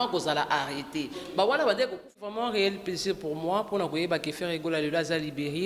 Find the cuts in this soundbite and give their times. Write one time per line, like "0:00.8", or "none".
0:02.4